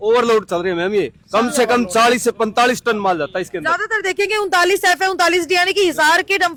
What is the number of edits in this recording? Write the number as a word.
zero